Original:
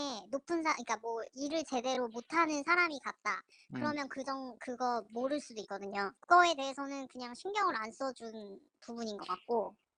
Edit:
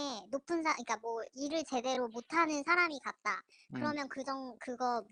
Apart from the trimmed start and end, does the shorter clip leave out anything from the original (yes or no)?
no